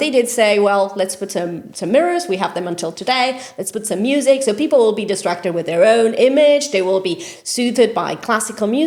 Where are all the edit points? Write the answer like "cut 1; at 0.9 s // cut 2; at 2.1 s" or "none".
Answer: none